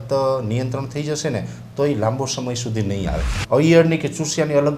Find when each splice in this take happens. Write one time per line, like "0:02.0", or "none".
0:03.3